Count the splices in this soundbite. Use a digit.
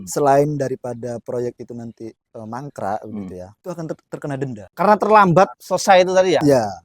3